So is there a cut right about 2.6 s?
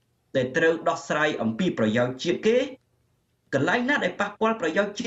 no; 0 cuts

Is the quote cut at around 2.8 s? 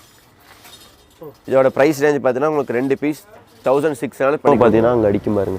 no; 1 cut; at 4.5 s

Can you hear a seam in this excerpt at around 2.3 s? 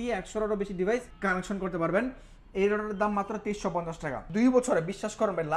no; 2 cuts; at 1.1 s, 4.2 s

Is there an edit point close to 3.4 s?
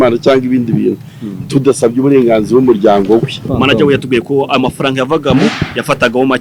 yes; 1 cut; at 3.4 s

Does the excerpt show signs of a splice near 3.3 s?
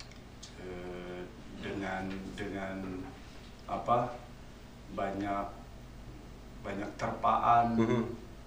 no; 0 cuts

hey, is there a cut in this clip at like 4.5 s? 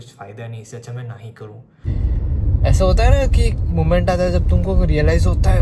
no; 1 cut; at 1.8 s

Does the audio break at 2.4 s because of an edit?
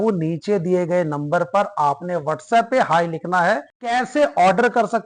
no; 1 cut; at 3.7 s

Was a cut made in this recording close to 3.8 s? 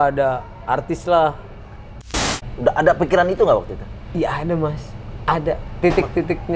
no; 1 cut; at 2.2 s

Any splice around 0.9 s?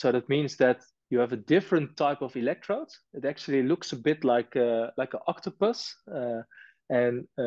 yes; 1 cut; at 0.9 s

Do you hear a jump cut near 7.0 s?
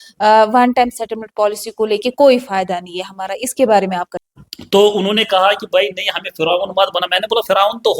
no; 1 cut; at 4.2 s

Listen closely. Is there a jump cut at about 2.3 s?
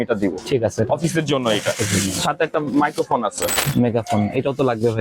no; 1 cut; at 3.6 s

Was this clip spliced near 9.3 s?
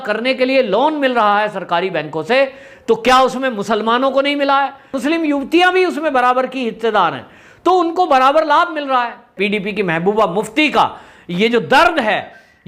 yes; 2 cuts; at 4.8 s, 9.3 s

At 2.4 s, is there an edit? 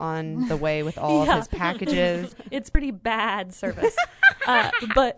yes; 1 cut; at 2.4 s

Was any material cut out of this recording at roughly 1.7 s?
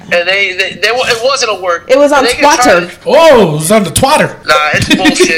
no; 2 cuts; at 2.9 s, 4.4 s

